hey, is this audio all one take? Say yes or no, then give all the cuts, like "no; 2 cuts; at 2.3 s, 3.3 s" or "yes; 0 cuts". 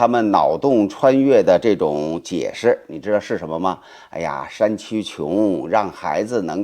yes; 0 cuts